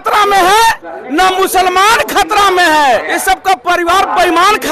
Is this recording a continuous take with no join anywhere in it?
no; 1 cut; at 3.1 s

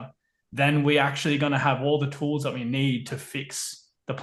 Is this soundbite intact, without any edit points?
yes; 0 cuts

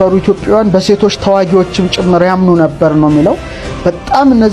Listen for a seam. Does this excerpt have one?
no; 0 cuts

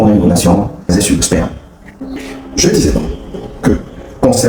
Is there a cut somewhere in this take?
no; 0 cuts

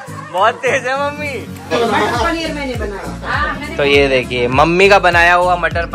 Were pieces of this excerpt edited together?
yes; 1 cut; at 1.6 s

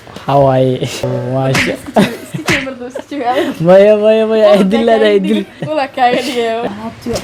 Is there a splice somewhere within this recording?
no; 0 cuts

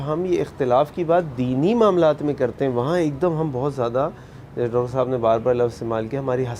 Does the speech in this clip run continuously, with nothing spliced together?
yes; 0 cuts

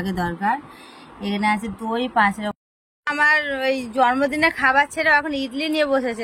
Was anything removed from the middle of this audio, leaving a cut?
yes; 1 cut; at 2.6 s

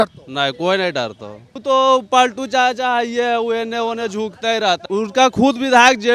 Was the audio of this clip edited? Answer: yes; 2 cuts; at 1.6 s, 4.8 s

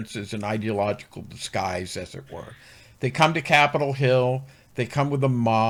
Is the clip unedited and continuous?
yes; 0 cuts

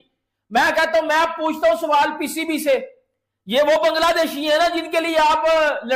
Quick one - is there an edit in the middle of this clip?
no; 0 cuts

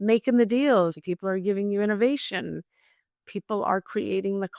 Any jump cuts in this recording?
yes; 1 cut; at 1.0 s

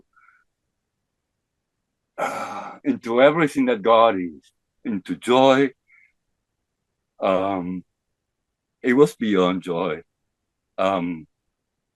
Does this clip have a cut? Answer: no; 0 cuts

